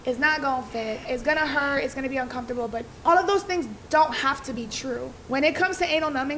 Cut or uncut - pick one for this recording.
cut